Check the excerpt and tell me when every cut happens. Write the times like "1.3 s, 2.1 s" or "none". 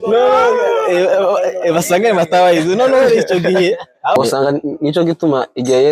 4.2 s